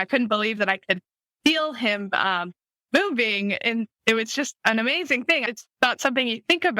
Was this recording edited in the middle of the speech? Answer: no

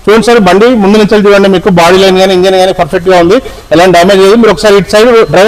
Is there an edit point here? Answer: no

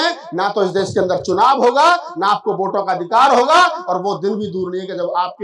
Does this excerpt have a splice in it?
no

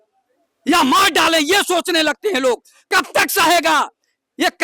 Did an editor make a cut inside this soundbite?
no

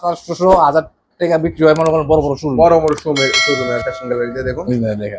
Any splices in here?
yes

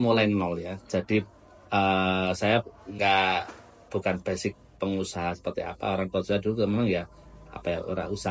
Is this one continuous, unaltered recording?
yes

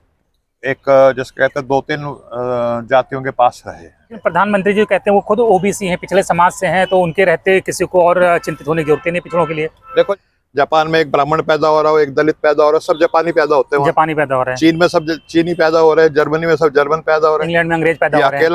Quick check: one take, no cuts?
no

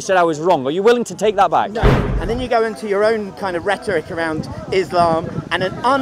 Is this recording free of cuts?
no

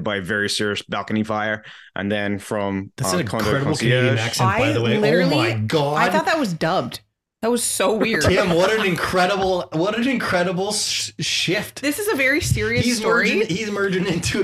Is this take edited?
no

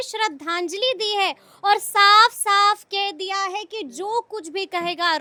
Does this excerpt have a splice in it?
no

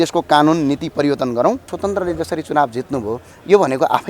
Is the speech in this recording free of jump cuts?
no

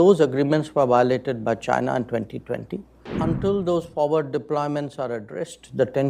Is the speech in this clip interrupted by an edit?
yes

